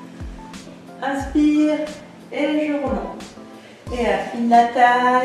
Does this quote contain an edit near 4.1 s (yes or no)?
no